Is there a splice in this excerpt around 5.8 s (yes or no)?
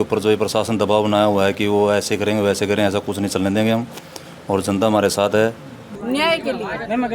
yes